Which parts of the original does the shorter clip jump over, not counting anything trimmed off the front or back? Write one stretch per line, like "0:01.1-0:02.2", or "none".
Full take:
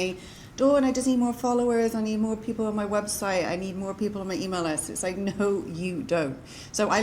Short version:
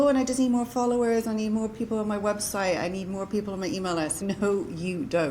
0:04.9-0:05.2